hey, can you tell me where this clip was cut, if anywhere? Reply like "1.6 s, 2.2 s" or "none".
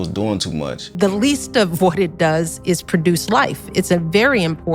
0.9 s